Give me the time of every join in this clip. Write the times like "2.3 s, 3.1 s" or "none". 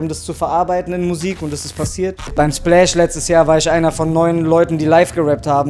2.2 s